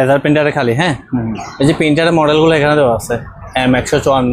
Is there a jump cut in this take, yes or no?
no